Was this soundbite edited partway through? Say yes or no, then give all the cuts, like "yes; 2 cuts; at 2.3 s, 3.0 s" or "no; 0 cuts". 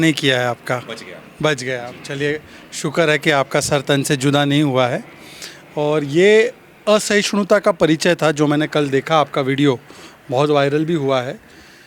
no; 0 cuts